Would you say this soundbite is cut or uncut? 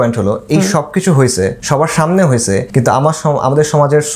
cut